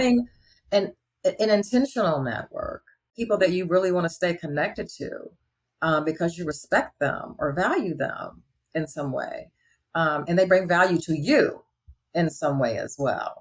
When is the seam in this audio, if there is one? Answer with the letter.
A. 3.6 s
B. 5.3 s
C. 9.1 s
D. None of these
D